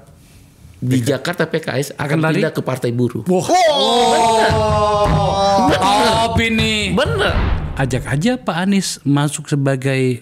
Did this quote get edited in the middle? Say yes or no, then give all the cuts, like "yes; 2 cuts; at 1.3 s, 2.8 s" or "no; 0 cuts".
yes; 1 cut; at 7.4 s